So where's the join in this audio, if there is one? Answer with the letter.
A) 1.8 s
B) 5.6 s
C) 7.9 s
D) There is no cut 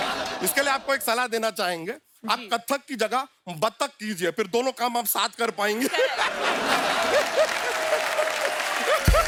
D